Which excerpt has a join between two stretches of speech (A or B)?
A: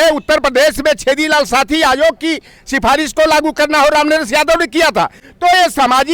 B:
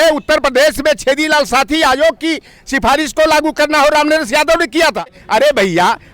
B